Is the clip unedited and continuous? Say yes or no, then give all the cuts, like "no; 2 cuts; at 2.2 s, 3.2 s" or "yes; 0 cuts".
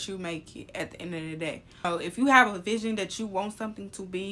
yes; 0 cuts